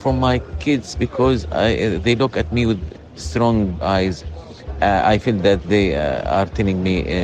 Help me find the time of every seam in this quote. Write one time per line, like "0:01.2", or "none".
0:02.9